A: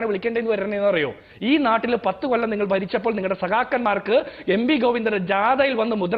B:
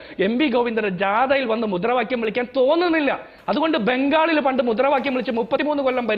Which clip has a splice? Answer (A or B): B